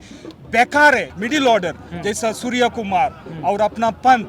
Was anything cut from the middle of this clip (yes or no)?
yes